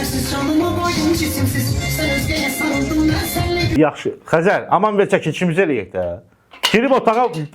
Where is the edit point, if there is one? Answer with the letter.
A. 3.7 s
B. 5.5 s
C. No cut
A